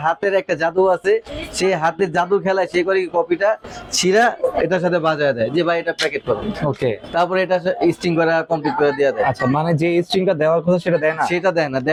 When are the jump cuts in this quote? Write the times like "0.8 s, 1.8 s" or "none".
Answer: none